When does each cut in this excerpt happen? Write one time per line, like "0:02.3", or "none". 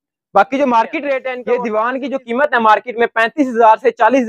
0:01.3